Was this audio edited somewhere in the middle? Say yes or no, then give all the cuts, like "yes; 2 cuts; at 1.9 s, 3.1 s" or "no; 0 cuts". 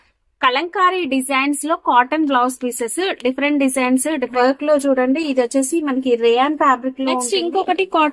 yes; 2 cuts; at 4.3 s, 7.2 s